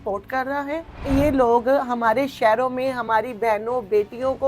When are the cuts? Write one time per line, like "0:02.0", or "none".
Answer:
0:01.0